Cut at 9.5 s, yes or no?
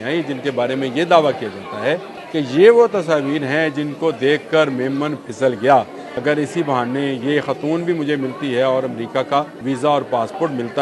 yes